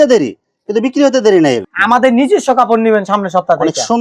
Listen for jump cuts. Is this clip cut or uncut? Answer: cut